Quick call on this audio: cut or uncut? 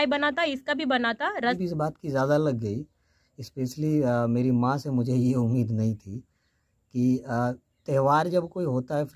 cut